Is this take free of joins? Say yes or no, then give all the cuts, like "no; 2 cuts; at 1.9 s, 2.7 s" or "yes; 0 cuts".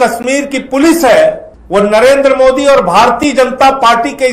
no; 1 cut; at 1.5 s